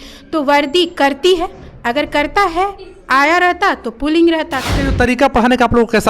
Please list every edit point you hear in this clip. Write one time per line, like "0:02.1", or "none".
0:04.6